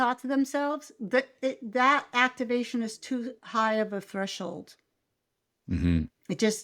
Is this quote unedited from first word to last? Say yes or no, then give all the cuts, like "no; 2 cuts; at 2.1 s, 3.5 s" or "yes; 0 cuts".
yes; 0 cuts